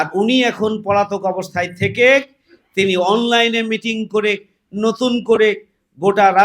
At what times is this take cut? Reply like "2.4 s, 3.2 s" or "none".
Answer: none